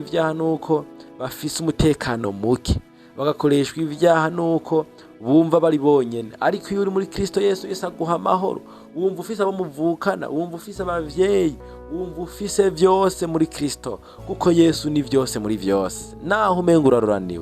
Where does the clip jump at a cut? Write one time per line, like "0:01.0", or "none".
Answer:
0:16.5